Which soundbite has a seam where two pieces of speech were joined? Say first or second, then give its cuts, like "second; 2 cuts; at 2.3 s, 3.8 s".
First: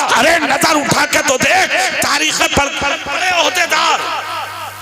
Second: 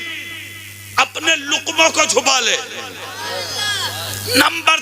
first; 1 cut; at 3.1 s